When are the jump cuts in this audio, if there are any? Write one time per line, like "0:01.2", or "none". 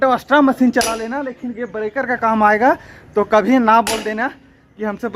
none

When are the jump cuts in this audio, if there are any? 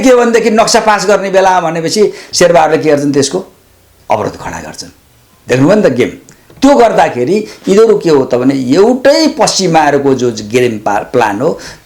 none

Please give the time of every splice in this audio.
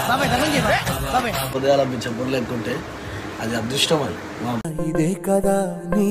0:01.5

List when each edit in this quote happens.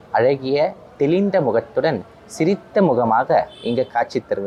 none

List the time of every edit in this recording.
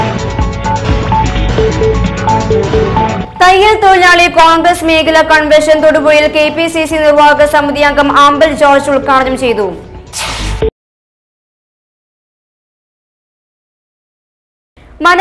none

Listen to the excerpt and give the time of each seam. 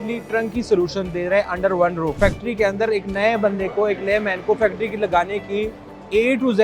0:02.2

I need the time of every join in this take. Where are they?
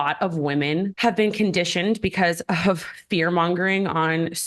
0:00.9

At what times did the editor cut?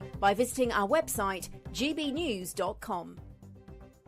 0:03.1

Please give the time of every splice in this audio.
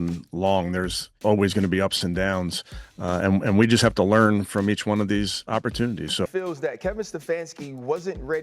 0:06.2

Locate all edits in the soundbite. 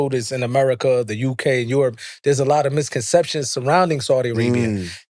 none

